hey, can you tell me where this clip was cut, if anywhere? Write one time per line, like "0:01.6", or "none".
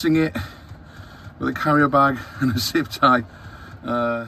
none